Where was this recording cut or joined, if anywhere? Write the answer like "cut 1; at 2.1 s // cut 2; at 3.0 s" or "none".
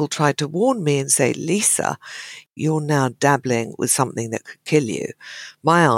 cut 1; at 2.5 s